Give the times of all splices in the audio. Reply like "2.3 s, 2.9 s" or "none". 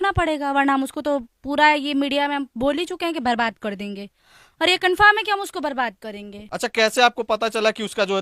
6.4 s